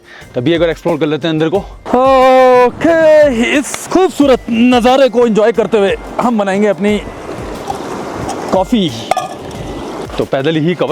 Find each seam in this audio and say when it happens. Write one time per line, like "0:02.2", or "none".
0:01.8
0:10.0